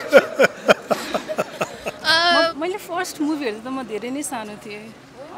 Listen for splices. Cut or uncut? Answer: cut